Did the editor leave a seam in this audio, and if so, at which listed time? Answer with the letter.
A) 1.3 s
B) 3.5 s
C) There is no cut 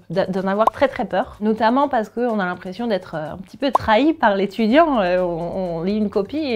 A